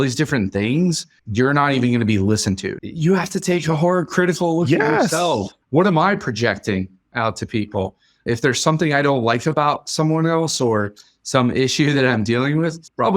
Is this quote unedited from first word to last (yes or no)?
no